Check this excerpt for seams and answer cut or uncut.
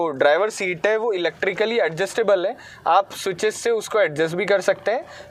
uncut